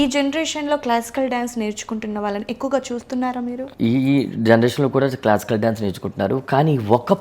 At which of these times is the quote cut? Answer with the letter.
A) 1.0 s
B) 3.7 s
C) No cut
B